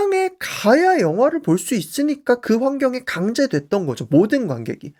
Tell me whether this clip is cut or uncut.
uncut